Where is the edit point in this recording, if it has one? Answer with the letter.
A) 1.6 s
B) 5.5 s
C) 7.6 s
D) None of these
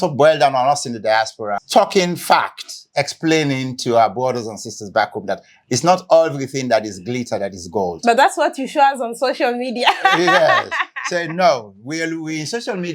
A